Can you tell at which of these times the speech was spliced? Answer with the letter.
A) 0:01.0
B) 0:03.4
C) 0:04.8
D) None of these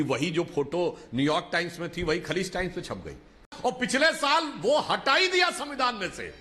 B